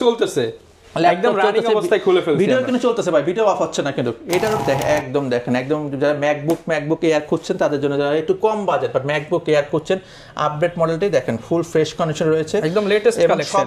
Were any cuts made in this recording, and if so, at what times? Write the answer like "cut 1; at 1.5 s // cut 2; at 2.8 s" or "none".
cut 1; at 4.6 s